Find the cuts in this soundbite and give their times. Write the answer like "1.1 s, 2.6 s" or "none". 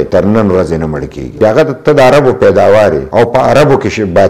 1.4 s, 3.0 s